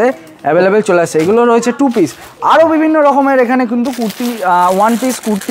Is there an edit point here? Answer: no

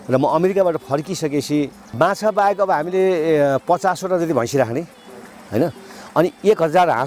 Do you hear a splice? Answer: yes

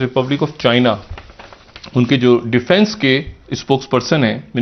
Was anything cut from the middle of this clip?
no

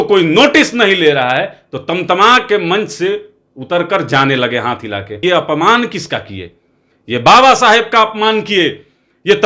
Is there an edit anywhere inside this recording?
yes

